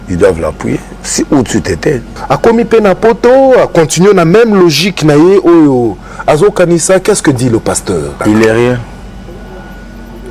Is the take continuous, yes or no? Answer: no